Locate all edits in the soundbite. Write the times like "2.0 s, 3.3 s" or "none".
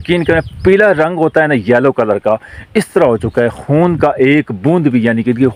none